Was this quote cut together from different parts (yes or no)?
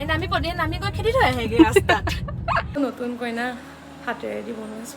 yes